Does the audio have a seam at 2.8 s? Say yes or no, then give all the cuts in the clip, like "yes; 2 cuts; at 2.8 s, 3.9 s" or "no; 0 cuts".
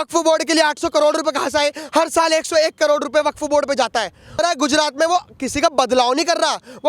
no; 1 cut; at 4.4 s